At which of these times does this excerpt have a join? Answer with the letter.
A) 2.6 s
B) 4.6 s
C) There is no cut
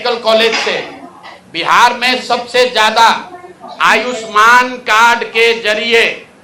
C